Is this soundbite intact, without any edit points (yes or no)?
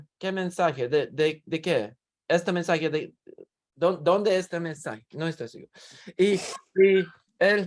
yes